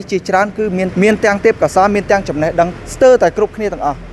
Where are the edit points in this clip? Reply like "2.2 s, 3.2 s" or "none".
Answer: 0.9 s, 2.8 s